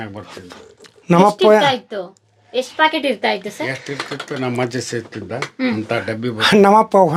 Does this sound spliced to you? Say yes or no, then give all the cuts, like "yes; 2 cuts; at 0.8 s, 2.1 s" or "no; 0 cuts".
no; 0 cuts